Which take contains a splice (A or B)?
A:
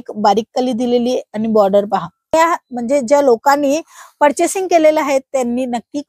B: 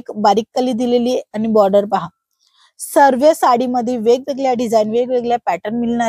A